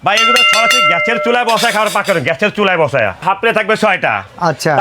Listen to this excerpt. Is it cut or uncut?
cut